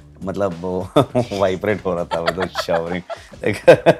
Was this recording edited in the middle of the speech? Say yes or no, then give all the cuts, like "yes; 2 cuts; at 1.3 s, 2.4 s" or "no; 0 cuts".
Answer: no; 0 cuts